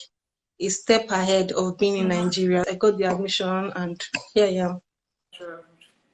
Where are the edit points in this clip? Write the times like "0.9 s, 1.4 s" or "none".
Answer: 2.7 s